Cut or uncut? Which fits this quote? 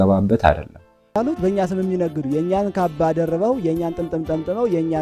cut